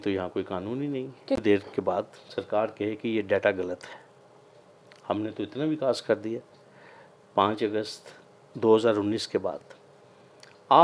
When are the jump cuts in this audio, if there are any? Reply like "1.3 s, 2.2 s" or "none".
1.4 s